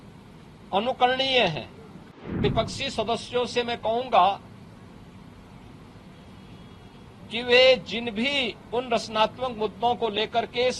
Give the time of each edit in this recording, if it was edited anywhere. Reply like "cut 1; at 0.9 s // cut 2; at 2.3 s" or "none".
cut 1; at 2.4 s